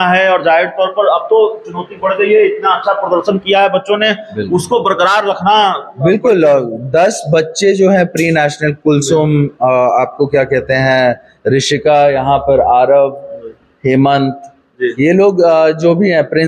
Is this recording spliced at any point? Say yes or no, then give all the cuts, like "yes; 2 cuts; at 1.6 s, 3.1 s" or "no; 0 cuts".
no; 0 cuts